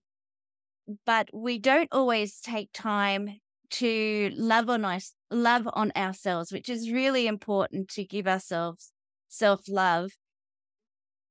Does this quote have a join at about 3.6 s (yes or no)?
no